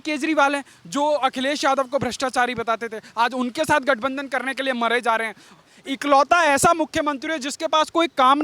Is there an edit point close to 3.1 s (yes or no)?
no